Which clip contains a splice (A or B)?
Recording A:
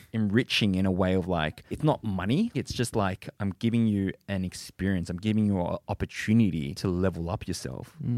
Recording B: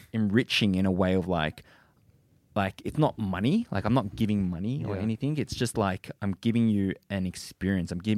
A